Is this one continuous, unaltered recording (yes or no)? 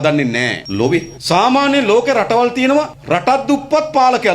no